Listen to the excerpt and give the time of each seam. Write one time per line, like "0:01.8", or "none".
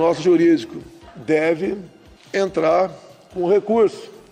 none